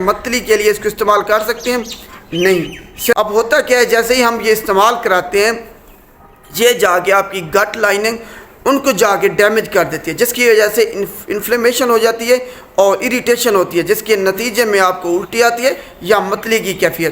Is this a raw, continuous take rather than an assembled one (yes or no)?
no